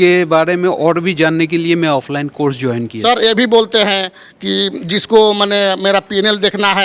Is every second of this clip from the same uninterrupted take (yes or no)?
no